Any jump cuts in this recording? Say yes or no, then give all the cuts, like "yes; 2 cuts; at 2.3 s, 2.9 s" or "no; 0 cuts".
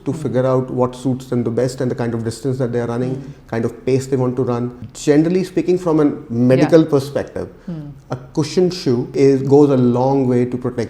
yes; 2 cuts; at 4.8 s, 9.1 s